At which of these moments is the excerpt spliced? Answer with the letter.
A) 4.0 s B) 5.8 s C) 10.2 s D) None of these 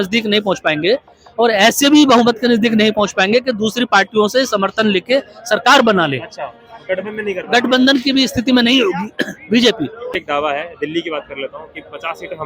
C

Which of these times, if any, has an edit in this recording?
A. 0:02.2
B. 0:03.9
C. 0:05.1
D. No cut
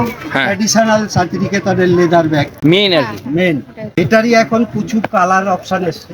B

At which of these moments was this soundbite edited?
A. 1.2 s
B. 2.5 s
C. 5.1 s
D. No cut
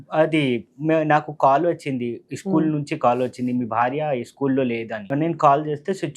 C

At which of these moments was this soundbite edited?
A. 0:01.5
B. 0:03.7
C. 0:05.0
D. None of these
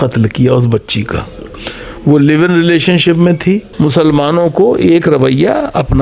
B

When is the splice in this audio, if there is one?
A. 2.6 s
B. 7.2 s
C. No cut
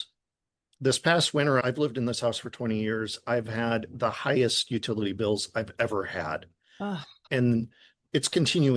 B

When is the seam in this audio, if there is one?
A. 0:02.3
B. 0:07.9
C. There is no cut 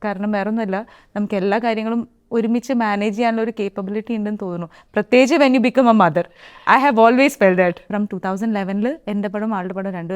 B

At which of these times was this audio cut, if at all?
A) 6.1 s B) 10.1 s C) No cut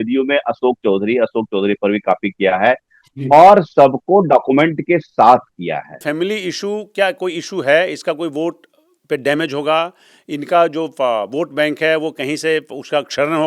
A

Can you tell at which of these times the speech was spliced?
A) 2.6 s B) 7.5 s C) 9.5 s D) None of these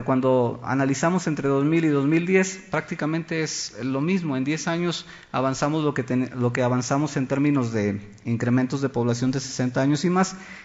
B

